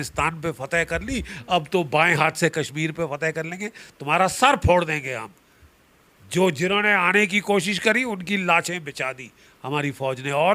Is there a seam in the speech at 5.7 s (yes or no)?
no